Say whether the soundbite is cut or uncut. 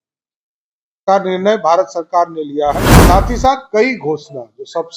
cut